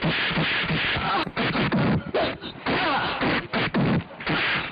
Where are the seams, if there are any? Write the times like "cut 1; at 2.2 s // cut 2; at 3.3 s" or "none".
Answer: cut 1; at 1.2 s